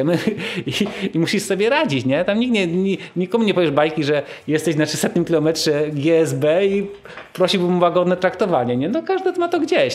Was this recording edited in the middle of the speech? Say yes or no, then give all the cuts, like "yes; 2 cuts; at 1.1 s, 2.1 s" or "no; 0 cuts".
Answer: no; 0 cuts